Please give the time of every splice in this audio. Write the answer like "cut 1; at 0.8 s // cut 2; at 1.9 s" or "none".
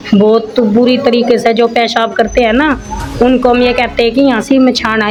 none